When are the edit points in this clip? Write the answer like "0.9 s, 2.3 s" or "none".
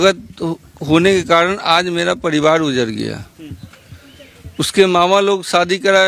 none